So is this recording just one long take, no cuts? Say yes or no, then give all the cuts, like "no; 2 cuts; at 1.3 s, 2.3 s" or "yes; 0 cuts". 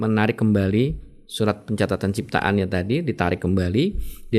yes; 0 cuts